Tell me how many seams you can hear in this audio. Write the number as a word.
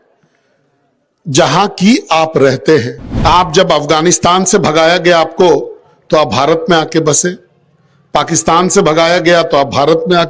one